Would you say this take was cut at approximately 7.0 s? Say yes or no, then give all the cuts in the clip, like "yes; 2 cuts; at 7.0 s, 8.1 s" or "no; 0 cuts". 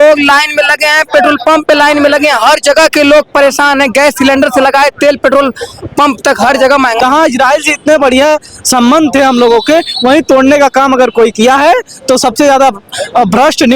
yes; 1 cut; at 7.0 s